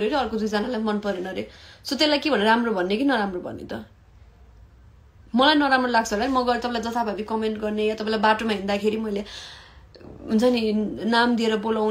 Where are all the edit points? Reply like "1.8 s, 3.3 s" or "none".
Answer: none